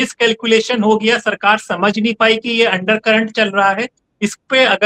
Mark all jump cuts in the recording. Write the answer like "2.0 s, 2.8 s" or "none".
none